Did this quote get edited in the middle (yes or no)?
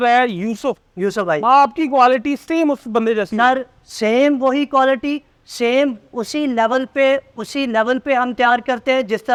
no